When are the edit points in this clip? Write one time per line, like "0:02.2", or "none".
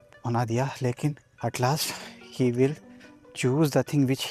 0:01.3